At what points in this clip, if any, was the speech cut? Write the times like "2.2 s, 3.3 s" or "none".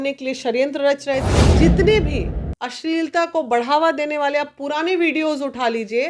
1.3 s

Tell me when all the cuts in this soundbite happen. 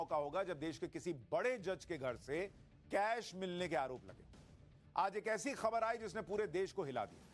none

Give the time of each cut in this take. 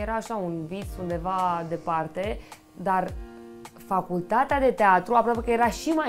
none

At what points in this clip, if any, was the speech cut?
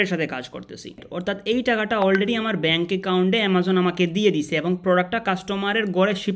1.1 s

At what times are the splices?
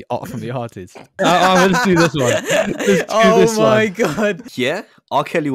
1.2 s, 4.4 s

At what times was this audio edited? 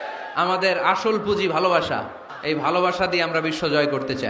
2.2 s

